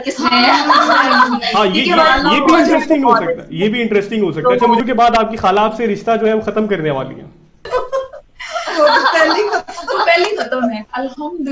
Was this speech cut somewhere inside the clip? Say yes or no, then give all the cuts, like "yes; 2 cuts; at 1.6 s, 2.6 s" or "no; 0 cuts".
yes; 2 cuts; at 4.8 s, 7.7 s